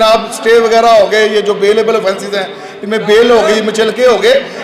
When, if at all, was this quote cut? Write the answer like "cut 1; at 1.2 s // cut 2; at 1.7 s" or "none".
none